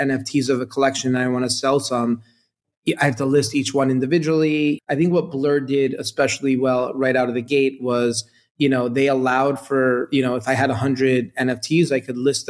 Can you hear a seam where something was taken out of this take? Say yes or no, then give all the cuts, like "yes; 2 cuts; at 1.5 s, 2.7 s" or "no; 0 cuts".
yes; 1 cut; at 4.8 s